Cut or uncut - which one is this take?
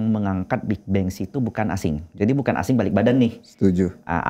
uncut